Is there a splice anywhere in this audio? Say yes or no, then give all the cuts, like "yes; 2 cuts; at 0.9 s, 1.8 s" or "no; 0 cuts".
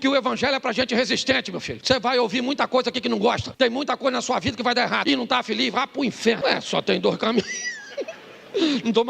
yes; 4 cuts; at 1.7 s, 3.5 s, 5.0 s, 6.4 s